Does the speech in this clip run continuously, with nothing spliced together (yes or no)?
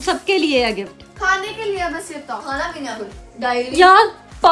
yes